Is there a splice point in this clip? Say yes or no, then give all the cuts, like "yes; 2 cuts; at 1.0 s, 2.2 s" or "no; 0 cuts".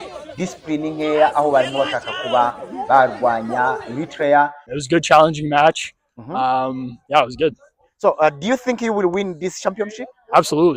yes; 1 cut; at 4.7 s